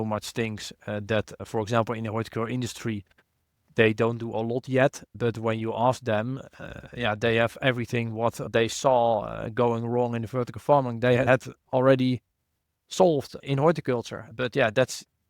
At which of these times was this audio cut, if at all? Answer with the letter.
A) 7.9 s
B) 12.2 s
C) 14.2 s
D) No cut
C